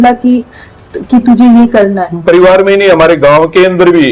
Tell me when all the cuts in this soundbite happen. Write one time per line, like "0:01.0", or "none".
0:02.1